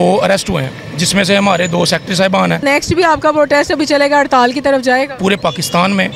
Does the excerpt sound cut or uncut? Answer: cut